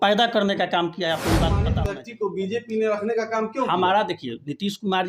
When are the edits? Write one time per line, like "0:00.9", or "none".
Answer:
0:01.7